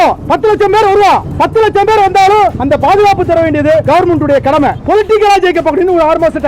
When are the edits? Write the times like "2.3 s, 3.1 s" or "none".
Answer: 4.8 s